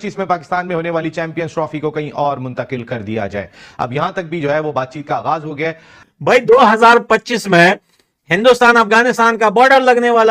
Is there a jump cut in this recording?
yes; 1 cut; at 6.1 s

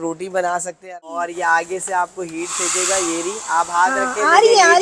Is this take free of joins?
no; 1 cut; at 1.3 s

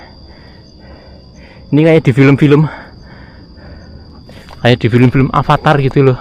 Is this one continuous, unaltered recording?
yes; 0 cuts

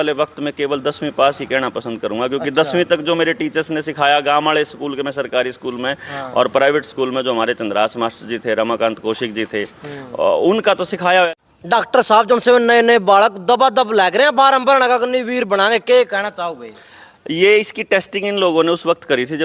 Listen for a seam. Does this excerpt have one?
no; 0 cuts

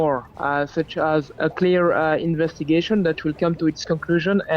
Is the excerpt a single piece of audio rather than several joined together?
no; 1 cut; at 1.3 s

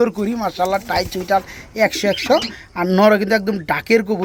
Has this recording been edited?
no; 0 cuts

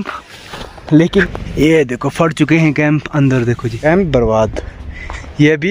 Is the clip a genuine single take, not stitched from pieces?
no; 2 cuts; at 1.2 s, 3.7 s

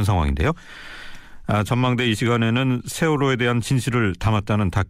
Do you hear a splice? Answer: yes; 1 cut; at 3.5 s

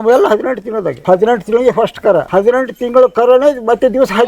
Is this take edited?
yes; 2 cuts; at 1.0 s, 2.3 s

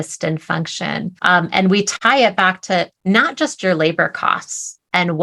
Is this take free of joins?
no; 2 cuts; at 1.1 s, 2.0 s

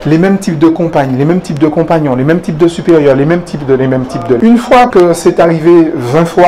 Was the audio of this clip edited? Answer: yes; 1 cut; at 4.4 s

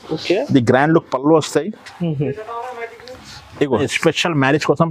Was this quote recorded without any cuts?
no; 1 cut; at 3.8 s

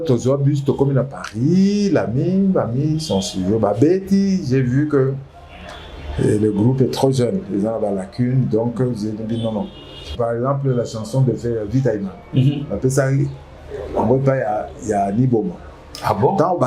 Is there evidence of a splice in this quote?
yes; 1 cut; at 10.1 s

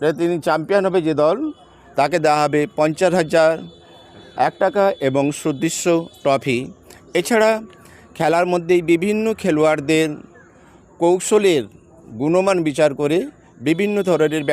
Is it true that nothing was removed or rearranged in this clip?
yes; 0 cuts

